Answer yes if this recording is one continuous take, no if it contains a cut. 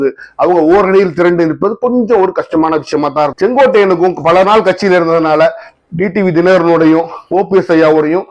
no